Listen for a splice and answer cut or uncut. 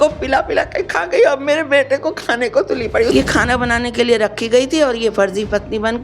cut